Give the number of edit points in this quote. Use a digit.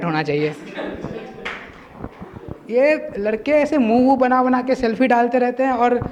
0